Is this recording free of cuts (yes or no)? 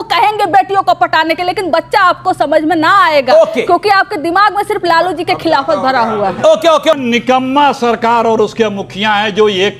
no